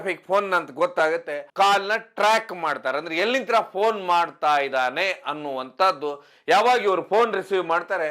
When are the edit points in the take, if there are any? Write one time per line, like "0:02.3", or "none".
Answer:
0:01.4